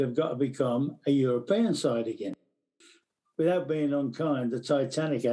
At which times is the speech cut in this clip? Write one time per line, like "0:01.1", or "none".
0:02.4